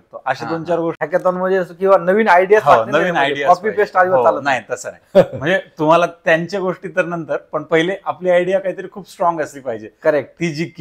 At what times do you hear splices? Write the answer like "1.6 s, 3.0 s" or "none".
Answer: 1.0 s